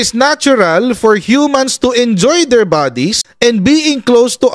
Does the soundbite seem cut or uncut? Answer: uncut